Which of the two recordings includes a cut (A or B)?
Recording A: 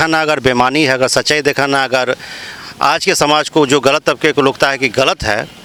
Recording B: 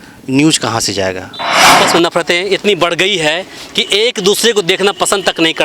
B